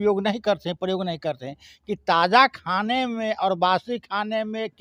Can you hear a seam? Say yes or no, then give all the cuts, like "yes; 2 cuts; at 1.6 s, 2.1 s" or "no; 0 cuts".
no; 0 cuts